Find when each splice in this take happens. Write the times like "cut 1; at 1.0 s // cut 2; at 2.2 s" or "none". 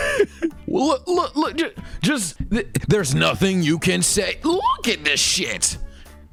none